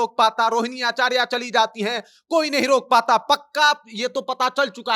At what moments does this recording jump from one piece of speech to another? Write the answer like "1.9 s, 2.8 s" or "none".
none